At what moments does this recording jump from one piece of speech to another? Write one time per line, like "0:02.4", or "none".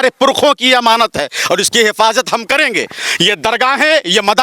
none